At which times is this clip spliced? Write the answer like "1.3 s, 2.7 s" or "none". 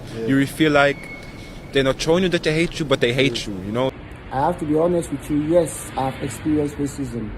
4.0 s